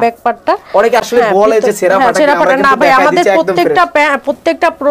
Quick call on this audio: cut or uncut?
uncut